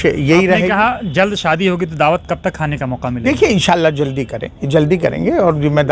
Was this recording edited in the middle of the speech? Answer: no; 0 cuts

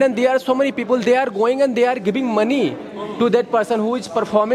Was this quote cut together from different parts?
no; 0 cuts

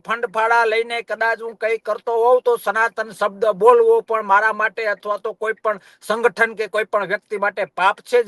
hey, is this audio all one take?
yes; 0 cuts

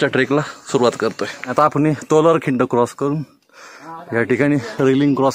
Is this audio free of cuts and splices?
no; 1 cut; at 1.4 s

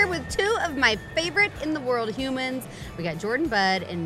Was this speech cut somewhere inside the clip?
no; 0 cuts

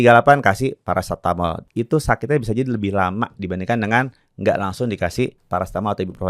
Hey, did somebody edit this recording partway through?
yes; 2 cuts; at 1.6 s, 5.4 s

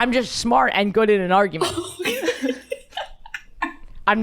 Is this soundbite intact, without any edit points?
yes; 0 cuts

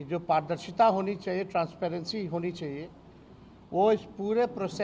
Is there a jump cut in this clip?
no; 0 cuts

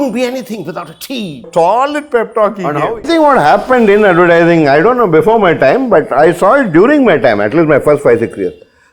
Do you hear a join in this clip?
yes; 2 cuts; at 1.5 s, 3.0 s

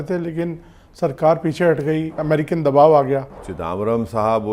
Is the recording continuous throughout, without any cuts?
no; 2 cuts; at 2.2 s, 3.5 s

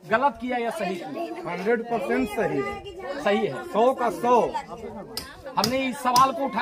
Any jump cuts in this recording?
no; 0 cuts

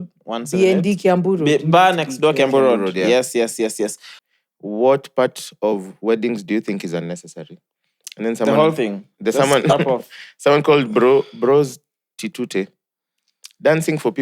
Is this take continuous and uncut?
no; 1 cut; at 4.1 s

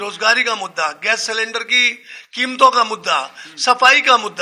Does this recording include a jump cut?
no; 0 cuts

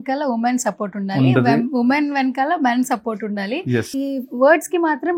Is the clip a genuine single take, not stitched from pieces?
yes; 0 cuts

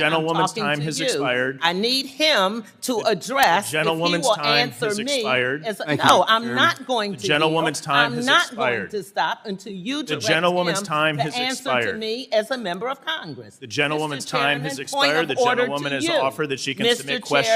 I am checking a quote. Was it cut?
no; 0 cuts

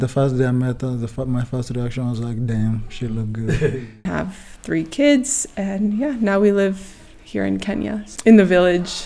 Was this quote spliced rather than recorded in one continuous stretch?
yes; 2 cuts; at 3.9 s, 8.1 s

